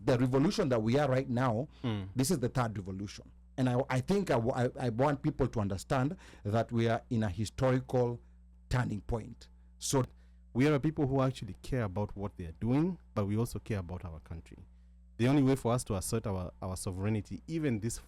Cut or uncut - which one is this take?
cut